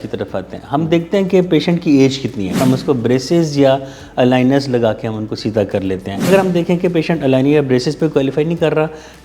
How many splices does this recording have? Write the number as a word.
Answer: two